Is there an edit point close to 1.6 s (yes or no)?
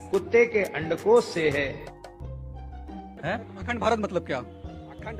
no